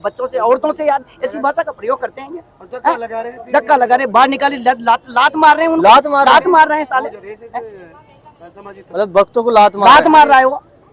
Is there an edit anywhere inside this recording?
no; 0 cuts

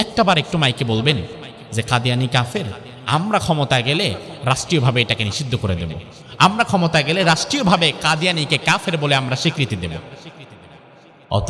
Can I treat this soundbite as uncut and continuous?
yes; 0 cuts

